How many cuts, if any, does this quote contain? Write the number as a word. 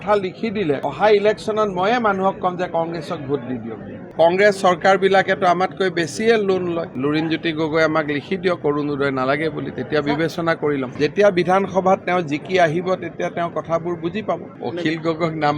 five